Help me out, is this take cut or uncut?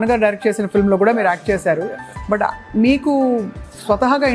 uncut